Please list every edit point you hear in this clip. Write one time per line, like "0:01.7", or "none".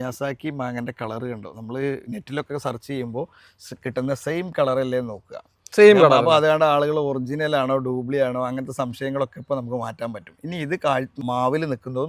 0:11.2